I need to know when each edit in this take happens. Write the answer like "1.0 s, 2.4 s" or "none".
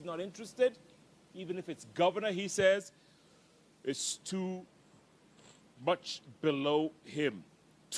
5.8 s